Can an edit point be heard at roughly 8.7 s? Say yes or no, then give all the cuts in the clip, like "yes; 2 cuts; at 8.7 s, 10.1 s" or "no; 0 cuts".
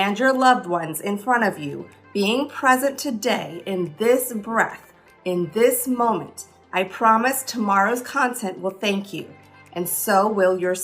no; 0 cuts